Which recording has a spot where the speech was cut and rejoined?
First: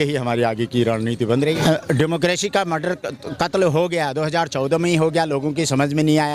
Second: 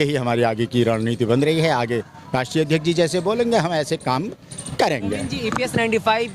first; 1 cut; at 1.6 s

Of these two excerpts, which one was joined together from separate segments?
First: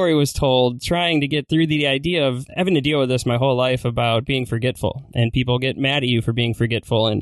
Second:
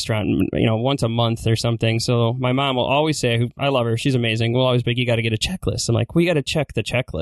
first; 2 cuts; at 1.4 s, 2.4 s

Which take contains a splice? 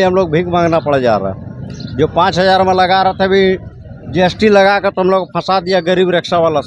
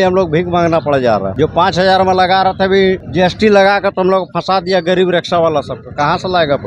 second; 2 cuts; at 1.3 s, 3.1 s

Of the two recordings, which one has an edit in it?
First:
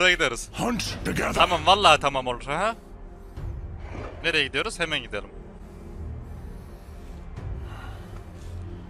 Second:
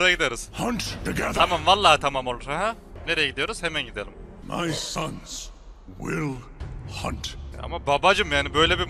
second; 3 cuts; at 2.9 s, 4.3 s, 7.5 s

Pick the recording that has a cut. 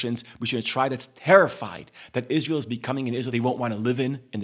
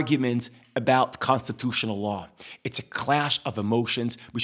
first; 1 cut; at 3.3 s

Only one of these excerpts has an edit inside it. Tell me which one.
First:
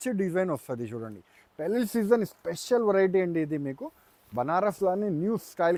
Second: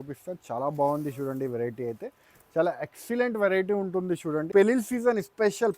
second; 1 cut; at 4.5 s

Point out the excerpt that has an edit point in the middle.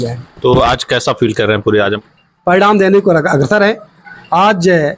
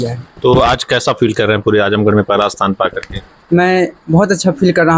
first; 1 cut; at 1.9 s

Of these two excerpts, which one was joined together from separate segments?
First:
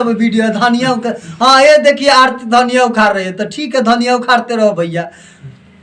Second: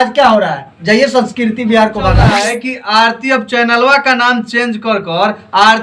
second; 1 cut; at 2.3 s

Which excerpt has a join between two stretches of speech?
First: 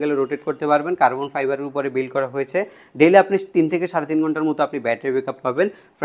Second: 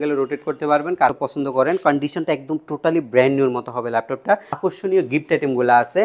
second; 2 cuts; at 1.1 s, 4.6 s

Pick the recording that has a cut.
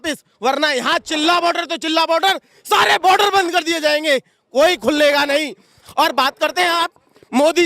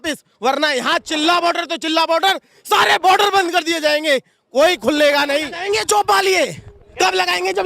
second; 1 cut; at 5.6 s

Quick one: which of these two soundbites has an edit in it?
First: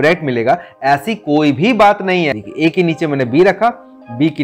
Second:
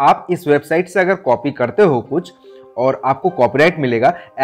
first; 1 cut; at 2.4 s

